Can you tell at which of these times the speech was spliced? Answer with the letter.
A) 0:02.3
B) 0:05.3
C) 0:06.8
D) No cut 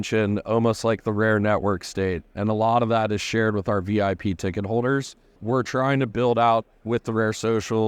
B